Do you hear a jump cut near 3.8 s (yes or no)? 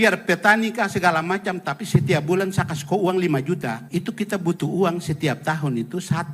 yes